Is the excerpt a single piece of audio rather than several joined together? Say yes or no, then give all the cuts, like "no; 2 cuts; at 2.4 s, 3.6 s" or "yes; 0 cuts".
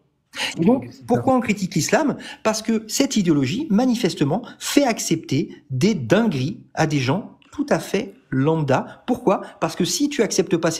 yes; 0 cuts